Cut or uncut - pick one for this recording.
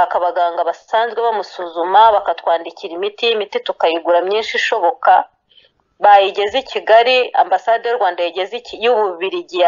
uncut